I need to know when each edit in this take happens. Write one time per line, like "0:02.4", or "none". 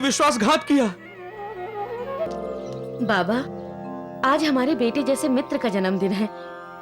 0:02.3